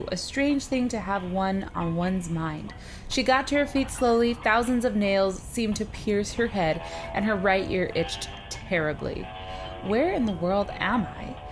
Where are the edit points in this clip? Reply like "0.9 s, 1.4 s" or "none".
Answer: 1.9 s

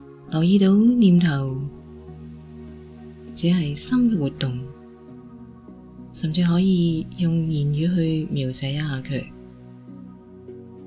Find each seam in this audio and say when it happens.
none

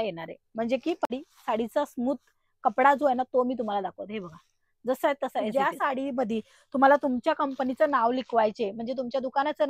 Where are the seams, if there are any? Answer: 1.1 s, 5.5 s

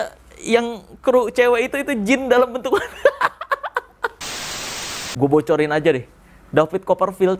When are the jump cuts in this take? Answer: 4.8 s

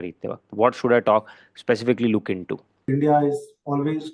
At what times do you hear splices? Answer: 2.9 s

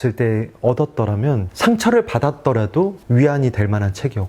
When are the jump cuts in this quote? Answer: 1.5 s, 3.0 s

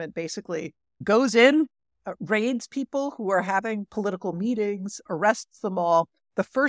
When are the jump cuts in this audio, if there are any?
1.0 s, 5.0 s

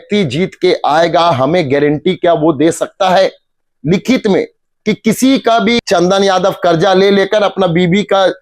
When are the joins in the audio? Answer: 5.8 s

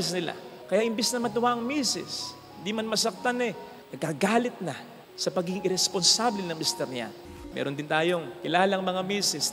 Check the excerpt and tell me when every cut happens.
7.2 s

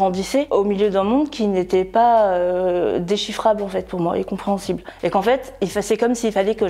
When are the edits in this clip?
none

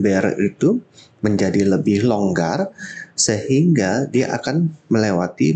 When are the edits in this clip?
none

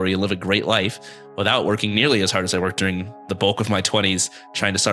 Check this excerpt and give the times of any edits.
3.3 s

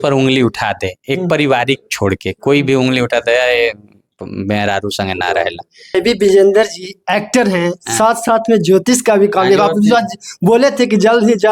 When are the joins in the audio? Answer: 5.9 s

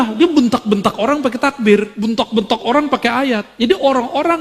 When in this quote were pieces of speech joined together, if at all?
1.9 s, 3.5 s

